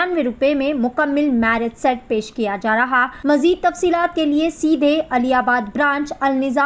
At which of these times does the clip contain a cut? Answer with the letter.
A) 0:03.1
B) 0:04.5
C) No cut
A